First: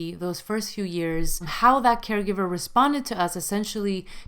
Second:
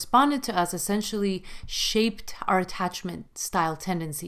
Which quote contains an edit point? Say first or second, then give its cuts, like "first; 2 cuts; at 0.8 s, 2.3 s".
first; 1 cut; at 1.5 s